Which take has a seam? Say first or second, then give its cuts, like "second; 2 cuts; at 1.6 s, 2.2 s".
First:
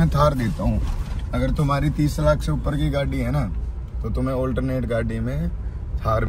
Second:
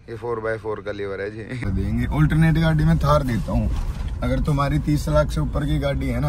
second; 1 cut; at 1.6 s